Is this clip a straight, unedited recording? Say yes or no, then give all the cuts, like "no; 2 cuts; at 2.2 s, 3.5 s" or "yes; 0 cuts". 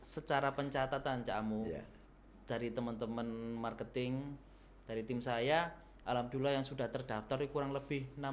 yes; 0 cuts